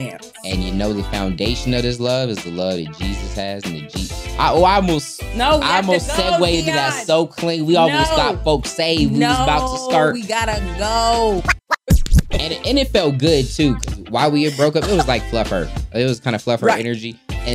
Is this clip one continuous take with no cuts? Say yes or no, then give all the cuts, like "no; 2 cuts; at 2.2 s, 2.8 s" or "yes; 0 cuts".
no; 1 cut; at 12.0 s